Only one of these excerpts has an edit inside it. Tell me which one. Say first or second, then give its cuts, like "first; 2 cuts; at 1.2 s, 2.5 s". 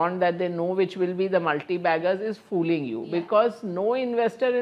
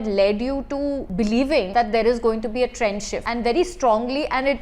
second; 3 cuts; at 1.1 s, 1.7 s, 3.2 s